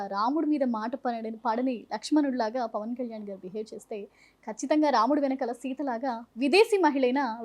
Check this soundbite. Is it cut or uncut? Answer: uncut